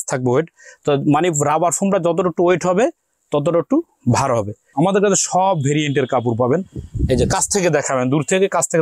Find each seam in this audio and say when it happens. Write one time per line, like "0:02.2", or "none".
0:04.6